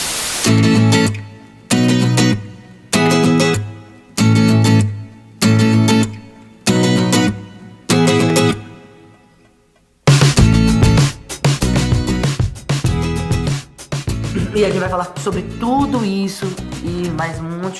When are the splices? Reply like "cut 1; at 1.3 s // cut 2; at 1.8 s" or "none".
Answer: none